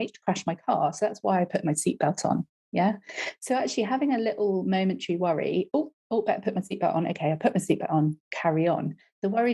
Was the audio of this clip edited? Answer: no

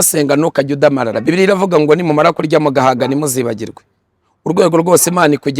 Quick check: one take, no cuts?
no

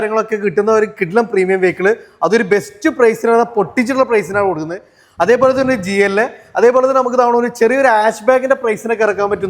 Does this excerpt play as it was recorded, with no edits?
yes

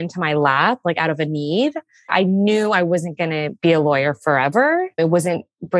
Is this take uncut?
no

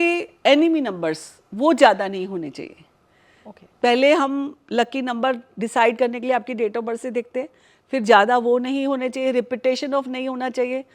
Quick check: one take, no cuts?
yes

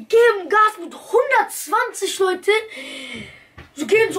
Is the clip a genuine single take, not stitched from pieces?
yes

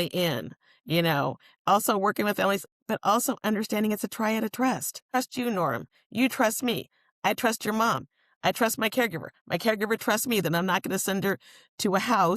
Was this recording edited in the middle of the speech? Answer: yes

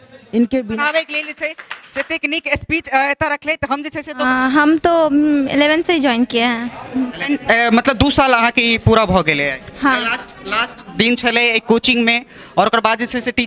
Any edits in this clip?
yes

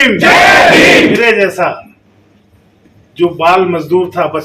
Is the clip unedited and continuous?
no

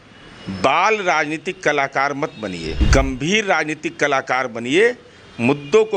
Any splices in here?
yes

